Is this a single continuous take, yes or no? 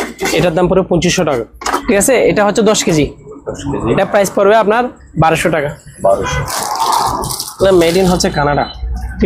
no